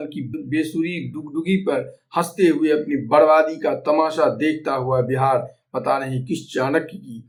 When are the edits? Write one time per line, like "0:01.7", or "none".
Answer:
none